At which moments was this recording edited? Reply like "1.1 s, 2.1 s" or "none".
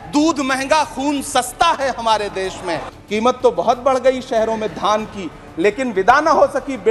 2.9 s